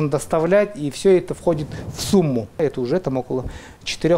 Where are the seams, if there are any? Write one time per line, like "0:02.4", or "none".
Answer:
0:02.6